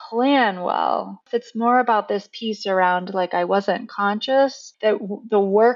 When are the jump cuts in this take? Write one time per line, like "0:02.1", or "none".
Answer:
0:01.3
0:04.7